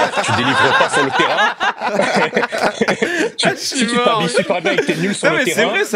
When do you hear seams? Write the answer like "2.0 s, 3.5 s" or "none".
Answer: none

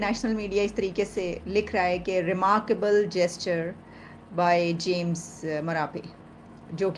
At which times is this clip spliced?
none

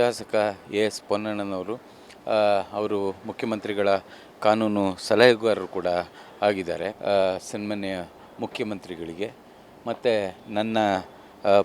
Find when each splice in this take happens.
6.9 s

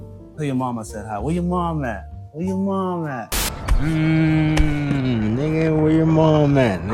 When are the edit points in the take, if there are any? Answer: none

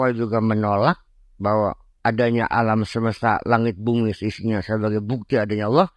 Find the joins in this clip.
none

